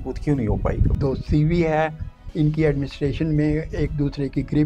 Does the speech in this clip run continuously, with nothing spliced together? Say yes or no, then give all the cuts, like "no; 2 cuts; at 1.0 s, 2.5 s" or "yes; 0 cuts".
no; 1 cut; at 0.9 s